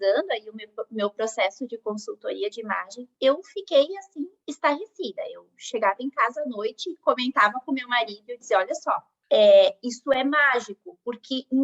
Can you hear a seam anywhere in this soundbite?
yes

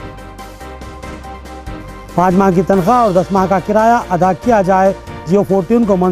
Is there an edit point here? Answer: yes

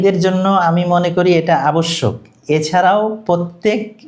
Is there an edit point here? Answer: no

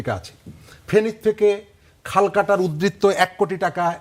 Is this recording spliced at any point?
no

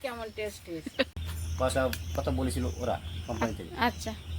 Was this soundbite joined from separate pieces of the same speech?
yes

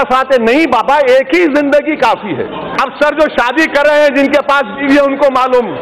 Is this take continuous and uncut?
no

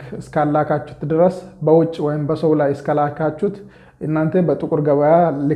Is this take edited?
no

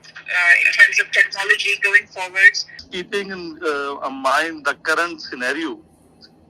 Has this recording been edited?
yes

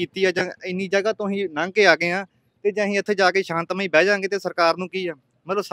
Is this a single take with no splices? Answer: yes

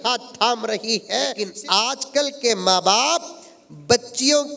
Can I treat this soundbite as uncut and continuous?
no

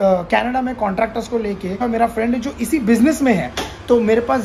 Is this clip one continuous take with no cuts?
no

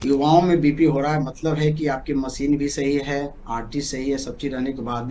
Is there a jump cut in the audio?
no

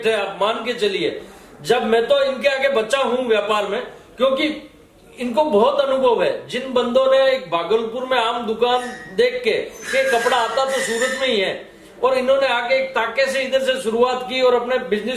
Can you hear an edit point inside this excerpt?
no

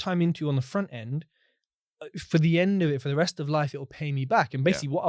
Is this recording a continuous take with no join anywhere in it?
yes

